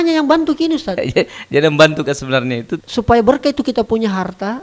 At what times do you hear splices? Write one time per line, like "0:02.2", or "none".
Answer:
0:02.7

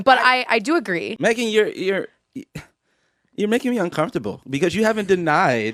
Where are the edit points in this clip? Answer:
none

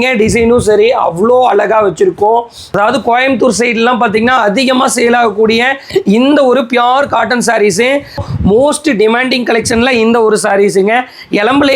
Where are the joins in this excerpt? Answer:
0:02.6
0:08.2

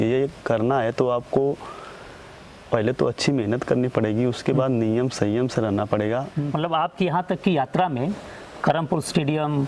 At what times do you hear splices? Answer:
0:06.4

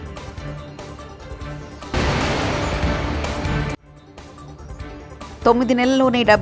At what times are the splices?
0:01.9
0:05.3

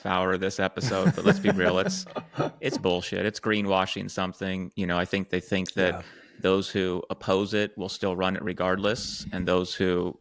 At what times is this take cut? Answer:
none

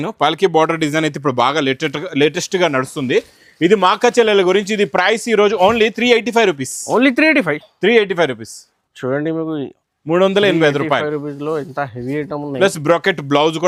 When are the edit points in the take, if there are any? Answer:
none

